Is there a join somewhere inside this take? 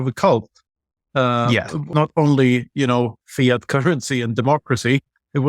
yes; 1 cut; at 1.9 s

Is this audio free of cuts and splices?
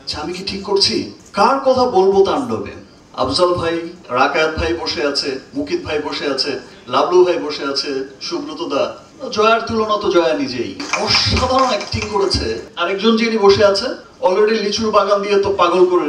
no; 4 cuts; at 1.2 s, 4.0 s, 9.1 s, 12.7 s

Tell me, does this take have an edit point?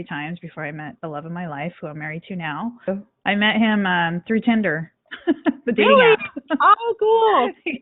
yes; 1 cut; at 2.9 s

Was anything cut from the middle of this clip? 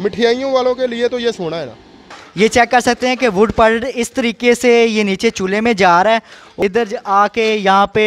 yes; 2 cuts; at 1.9 s, 6.5 s

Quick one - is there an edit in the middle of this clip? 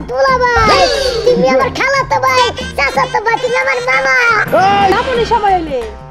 yes; 1 cut; at 4.9 s

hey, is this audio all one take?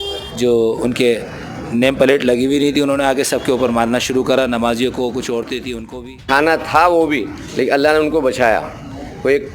no; 1 cut; at 6.2 s

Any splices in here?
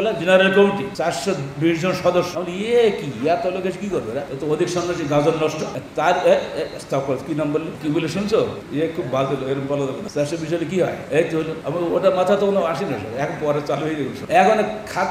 yes; 9 cuts; at 0.9 s, 2.4 s, 4.3 s, 5.8 s, 7.8 s, 8.6 s, 10.0 s, 11.5 s, 14.2 s

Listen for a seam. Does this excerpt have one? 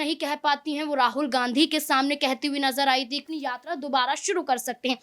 yes; 1 cut; at 3.2 s

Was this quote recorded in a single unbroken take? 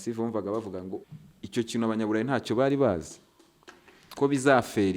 no; 1 cut; at 1.1 s

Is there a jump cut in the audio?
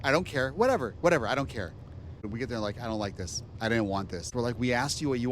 yes; 2 cuts; at 2.3 s, 4.3 s

